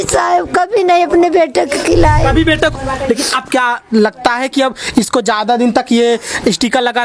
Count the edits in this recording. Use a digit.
1